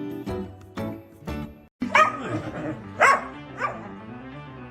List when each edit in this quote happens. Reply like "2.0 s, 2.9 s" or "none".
1.6 s